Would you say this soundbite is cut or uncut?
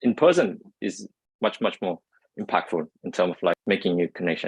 cut